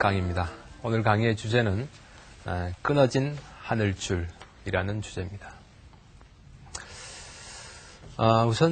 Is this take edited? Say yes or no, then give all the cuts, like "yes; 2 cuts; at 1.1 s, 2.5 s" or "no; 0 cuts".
yes; 1 cut; at 5.8 s